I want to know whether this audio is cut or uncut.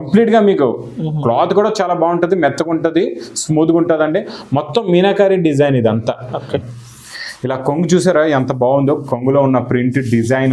cut